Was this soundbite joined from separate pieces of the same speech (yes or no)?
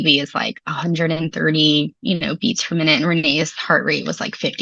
no